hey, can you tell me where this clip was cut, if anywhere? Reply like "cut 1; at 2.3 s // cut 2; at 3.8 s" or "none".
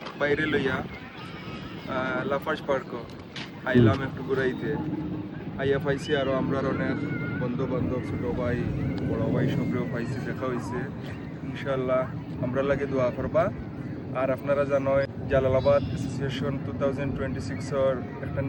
none